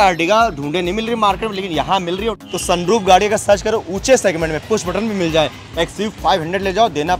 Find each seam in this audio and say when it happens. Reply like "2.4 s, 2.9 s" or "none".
2.4 s